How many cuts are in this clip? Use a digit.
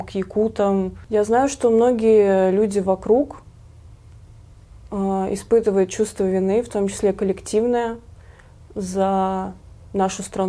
1